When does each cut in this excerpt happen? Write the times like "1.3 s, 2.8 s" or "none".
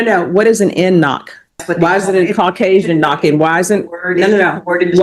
1.6 s